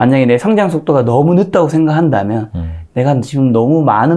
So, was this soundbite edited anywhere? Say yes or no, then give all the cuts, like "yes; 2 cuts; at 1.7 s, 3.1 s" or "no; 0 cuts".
no; 0 cuts